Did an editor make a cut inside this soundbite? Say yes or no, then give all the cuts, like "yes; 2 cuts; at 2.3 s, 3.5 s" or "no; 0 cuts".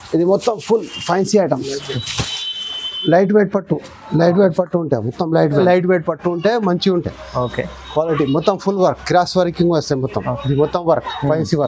yes; 1 cut; at 5.6 s